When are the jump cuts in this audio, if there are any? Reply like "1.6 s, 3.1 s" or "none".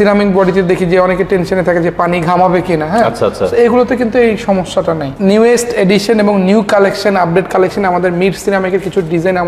5.1 s